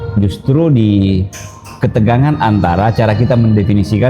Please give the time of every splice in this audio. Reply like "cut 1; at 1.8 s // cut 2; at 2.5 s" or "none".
none